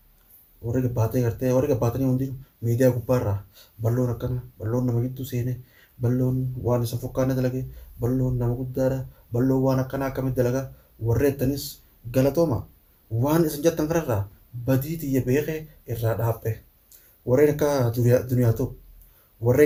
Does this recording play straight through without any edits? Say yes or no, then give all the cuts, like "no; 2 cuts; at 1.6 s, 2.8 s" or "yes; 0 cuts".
yes; 0 cuts